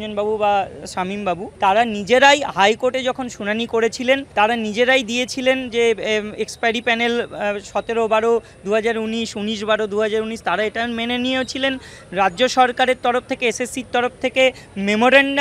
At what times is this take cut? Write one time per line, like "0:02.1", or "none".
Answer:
0:01.5
0:04.3